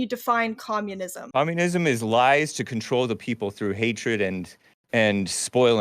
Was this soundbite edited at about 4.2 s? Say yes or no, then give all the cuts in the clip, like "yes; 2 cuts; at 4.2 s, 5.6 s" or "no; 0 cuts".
no; 1 cut; at 1.2 s